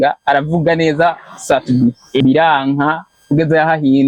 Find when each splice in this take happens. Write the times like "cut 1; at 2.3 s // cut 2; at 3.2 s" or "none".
cut 1; at 2.2 s // cut 2; at 3.1 s